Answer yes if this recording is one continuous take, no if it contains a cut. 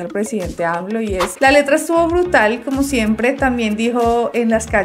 no